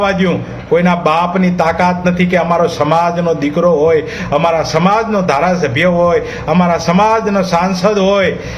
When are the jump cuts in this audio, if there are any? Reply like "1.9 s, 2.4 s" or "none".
none